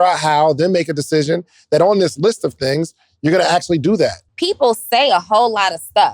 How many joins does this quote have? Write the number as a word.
one